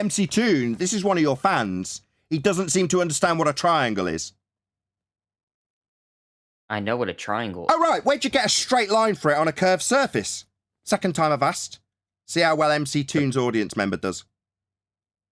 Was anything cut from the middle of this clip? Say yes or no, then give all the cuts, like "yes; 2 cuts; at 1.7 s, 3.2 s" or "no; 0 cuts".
no; 0 cuts